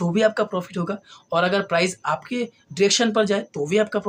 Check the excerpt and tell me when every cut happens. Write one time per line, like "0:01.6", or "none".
none